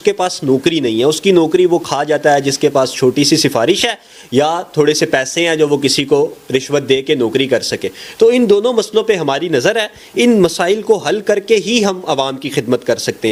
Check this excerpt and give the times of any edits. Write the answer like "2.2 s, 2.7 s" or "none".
none